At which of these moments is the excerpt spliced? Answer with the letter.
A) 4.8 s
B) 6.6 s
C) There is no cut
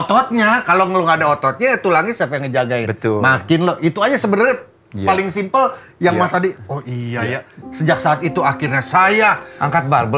C